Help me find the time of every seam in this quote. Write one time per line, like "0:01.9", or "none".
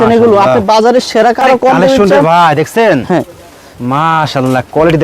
0:01.4